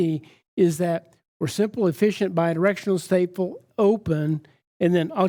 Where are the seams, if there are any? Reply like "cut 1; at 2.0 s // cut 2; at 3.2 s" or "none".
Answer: none